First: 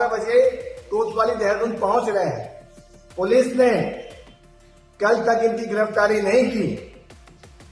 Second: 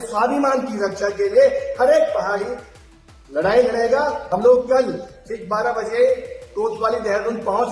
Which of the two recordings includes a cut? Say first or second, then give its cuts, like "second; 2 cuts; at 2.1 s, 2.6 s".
second; 1 cut; at 4.2 s